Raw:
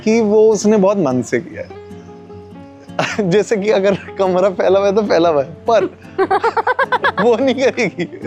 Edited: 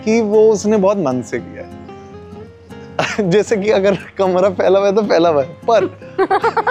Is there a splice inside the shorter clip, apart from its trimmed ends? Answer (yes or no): no